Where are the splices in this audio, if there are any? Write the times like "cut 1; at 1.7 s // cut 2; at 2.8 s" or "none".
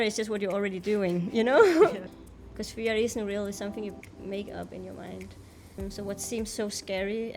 cut 1; at 2.0 s // cut 2; at 5.8 s